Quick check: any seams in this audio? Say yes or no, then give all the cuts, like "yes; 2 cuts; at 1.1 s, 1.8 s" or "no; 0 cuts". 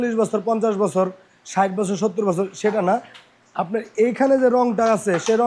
no; 0 cuts